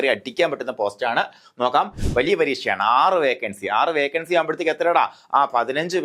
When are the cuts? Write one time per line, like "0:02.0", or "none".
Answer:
0:02.0